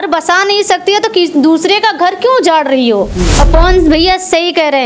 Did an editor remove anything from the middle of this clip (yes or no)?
yes